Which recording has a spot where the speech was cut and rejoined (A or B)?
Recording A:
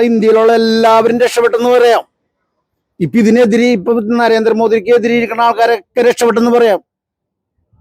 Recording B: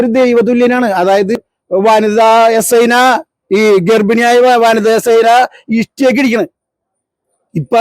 B